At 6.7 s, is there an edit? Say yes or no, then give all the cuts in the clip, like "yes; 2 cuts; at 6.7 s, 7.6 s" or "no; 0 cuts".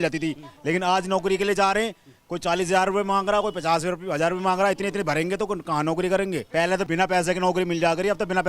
yes; 1 cut; at 6.7 s